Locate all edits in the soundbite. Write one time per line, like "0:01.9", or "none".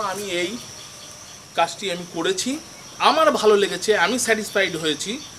none